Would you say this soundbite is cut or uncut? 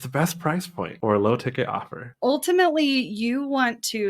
cut